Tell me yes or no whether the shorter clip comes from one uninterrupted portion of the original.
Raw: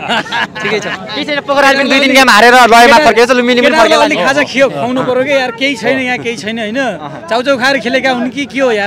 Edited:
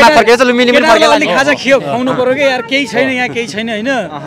yes